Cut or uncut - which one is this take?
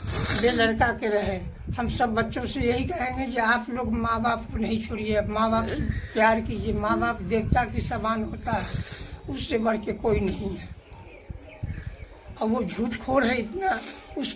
uncut